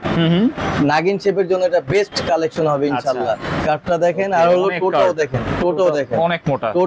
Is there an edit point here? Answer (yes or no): yes